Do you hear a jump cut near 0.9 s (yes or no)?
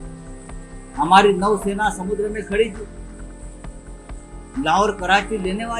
yes